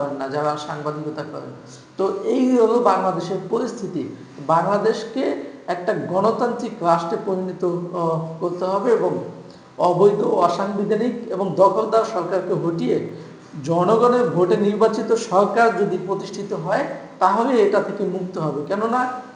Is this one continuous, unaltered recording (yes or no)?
yes